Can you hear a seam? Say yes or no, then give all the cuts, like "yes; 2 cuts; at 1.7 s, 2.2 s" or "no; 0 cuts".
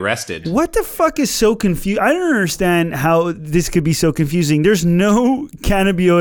no; 0 cuts